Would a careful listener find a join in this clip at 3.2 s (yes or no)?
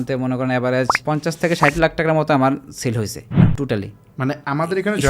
yes